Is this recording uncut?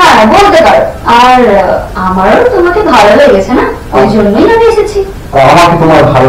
yes; 0 cuts

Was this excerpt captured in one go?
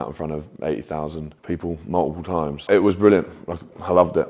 no; 2 cuts; at 1.3 s, 2.6 s

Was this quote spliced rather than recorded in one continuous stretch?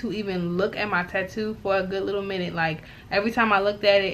no; 0 cuts

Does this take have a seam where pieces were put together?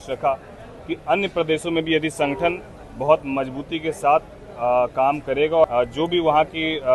yes; 1 cut; at 5.6 s

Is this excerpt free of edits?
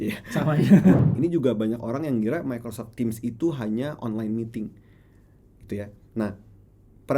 no; 1 cut; at 1.0 s

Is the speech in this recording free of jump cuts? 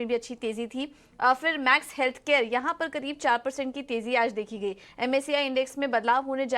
no; 1 cut; at 3.1 s

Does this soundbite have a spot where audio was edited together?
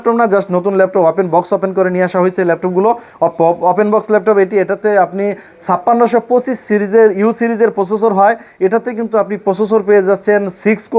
no; 0 cuts

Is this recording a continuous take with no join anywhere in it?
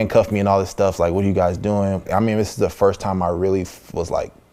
no; 1 cut; at 2.1 s

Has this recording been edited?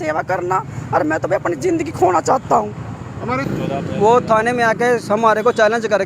yes; 1 cut; at 3.5 s

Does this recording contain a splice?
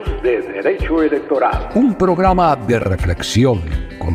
no; 0 cuts

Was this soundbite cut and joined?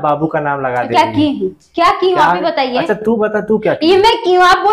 no; 0 cuts

